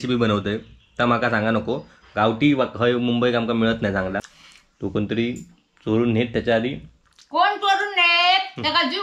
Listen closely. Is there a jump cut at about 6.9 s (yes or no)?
no